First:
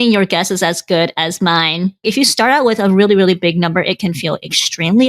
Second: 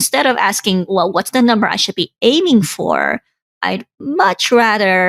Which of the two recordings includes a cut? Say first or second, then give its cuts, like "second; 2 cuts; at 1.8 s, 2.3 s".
first; 1 cut; at 2.0 s